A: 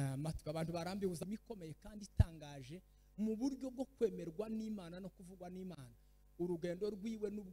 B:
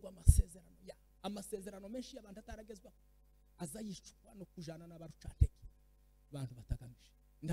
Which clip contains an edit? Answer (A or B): A